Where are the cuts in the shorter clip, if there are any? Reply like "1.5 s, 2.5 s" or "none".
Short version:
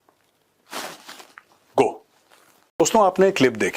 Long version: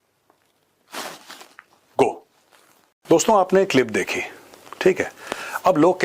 2.8 s